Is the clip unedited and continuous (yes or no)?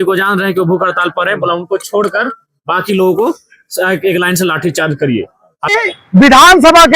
no